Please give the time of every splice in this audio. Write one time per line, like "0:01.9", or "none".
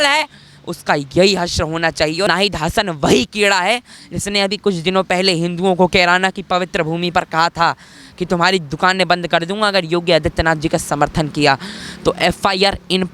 0:02.3